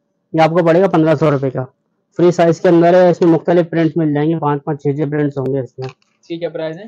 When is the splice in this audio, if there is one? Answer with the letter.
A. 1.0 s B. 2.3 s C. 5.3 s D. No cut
D